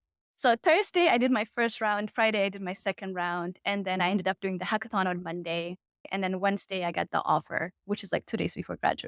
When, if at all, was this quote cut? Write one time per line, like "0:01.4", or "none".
0:06.1